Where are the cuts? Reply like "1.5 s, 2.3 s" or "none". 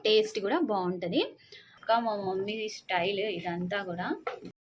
1.8 s